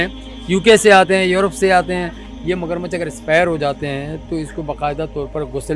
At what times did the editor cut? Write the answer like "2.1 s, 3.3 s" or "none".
2.2 s